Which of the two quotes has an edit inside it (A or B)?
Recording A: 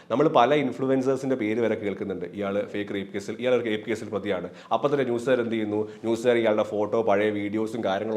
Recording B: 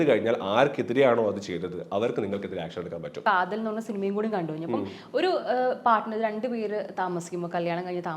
B